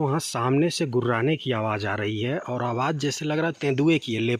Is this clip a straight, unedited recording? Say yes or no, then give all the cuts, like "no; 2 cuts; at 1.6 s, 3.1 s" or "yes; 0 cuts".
yes; 0 cuts